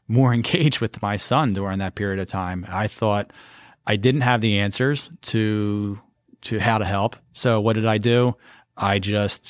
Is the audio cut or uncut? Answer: uncut